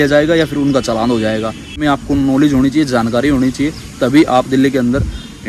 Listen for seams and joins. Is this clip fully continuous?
no; 1 cut; at 1.8 s

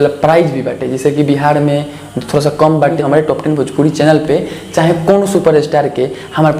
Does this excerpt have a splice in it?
yes; 1 cut; at 3.0 s

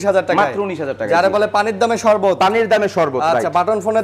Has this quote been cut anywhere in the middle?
no; 0 cuts

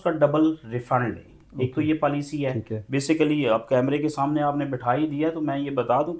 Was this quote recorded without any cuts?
yes; 0 cuts

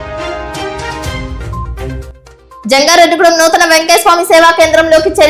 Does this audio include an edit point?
yes; 1 cut; at 2.6 s

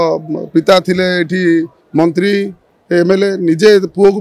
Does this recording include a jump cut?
no; 0 cuts

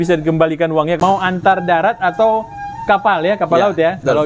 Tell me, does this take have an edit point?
yes; 1 cut; at 1.0 s

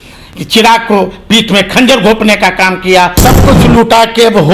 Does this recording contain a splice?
yes; 1 cut; at 3.2 s

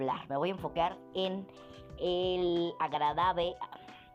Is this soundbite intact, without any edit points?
yes; 0 cuts

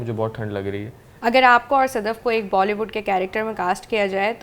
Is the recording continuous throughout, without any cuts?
no; 1 cut; at 1.0 s

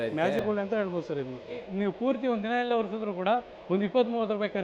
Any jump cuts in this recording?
yes; 1 cut; at 1.6 s

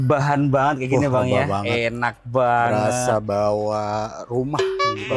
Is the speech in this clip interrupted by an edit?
no; 0 cuts

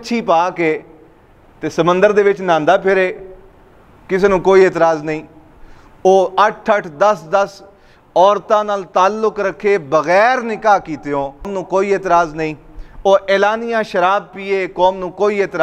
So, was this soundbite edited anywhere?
yes; 1 cut; at 11.6 s

